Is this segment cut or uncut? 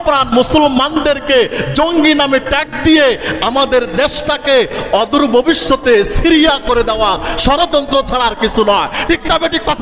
uncut